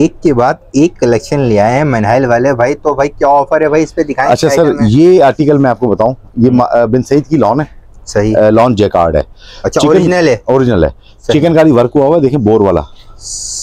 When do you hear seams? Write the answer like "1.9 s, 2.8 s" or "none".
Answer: none